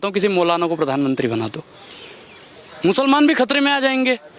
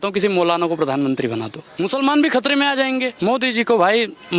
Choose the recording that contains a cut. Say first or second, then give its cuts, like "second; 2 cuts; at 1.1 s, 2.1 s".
second; 2 cuts; at 1.6 s, 3.1 s